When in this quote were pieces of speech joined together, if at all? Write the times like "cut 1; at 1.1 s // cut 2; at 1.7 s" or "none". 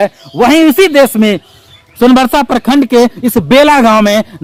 none